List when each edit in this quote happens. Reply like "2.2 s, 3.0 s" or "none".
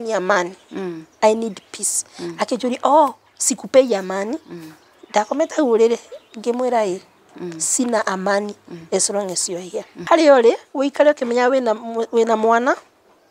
9.9 s

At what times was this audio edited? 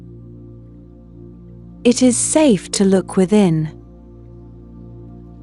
1.8 s, 4.4 s

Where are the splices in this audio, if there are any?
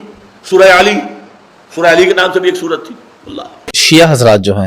3.7 s

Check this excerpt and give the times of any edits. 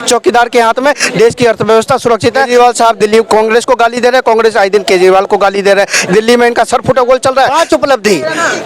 2.5 s, 7.5 s

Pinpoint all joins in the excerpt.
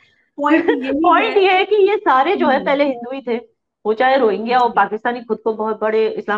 none

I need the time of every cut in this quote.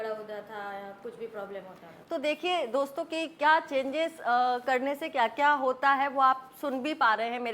none

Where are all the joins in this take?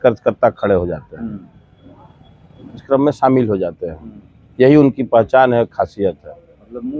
2.8 s

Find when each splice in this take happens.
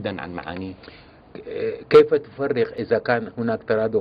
2.8 s

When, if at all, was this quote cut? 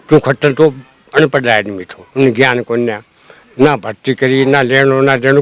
none

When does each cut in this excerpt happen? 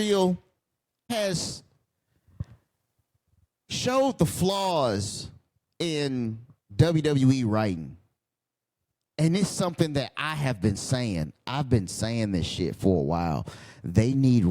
1.1 s

